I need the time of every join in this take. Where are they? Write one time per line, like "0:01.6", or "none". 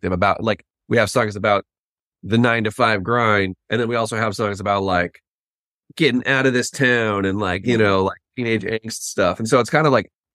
none